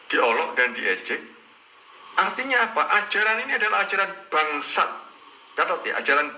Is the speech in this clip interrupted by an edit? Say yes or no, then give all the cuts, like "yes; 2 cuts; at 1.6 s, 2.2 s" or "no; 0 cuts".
no; 0 cuts